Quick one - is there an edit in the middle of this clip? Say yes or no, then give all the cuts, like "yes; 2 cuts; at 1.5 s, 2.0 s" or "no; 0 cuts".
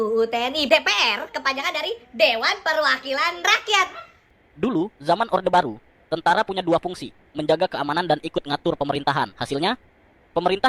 yes; 1 cut; at 4.3 s